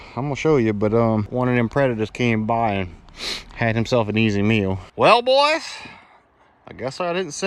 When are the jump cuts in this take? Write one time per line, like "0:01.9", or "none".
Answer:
0:01.3
0:04.8